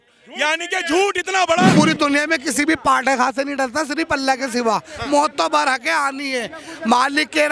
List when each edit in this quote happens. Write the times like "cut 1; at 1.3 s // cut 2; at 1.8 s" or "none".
cut 1; at 1.7 s